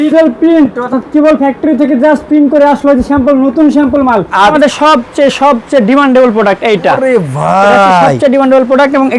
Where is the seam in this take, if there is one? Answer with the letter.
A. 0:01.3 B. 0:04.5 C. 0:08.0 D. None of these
B